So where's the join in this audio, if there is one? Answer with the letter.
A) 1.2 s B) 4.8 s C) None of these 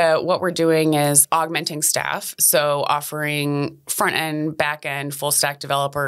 A